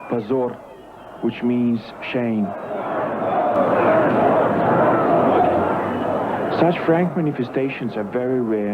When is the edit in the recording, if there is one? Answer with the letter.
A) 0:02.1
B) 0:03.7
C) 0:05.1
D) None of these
D